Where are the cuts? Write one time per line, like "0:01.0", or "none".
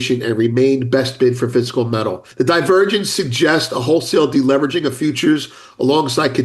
0:02.2